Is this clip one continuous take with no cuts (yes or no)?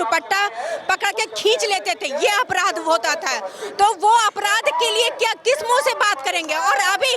yes